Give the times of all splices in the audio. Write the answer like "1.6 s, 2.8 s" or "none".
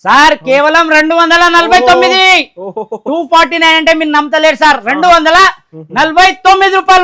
none